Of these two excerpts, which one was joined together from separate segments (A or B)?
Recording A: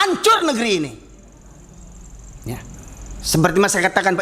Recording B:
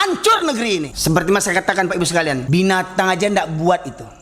B